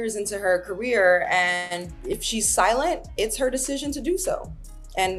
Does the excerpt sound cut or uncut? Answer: uncut